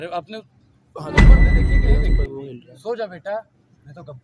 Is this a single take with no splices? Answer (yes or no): no